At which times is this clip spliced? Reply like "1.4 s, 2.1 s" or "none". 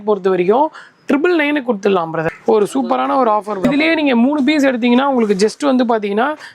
2.3 s, 3.6 s